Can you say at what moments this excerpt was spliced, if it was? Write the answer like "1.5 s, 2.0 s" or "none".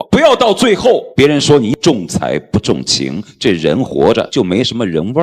1.1 s, 4.3 s